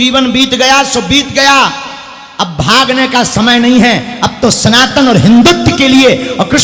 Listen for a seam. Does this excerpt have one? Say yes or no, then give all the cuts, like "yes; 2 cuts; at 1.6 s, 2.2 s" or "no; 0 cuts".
no; 0 cuts